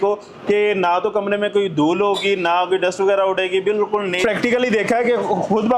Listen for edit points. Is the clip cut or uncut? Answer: cut